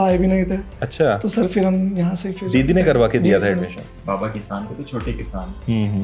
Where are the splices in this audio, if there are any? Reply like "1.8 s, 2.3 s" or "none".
4.0 s